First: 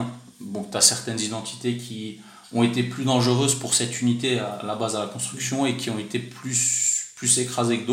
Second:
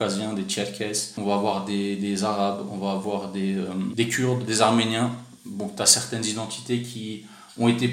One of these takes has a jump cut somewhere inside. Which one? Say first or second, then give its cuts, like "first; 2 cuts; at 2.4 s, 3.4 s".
second; 2 cuts; at 1.1 s, 3.9 s